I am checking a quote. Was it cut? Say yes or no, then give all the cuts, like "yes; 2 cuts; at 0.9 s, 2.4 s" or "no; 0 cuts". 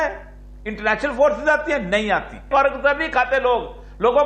yes; 1 cut; at 2.5 s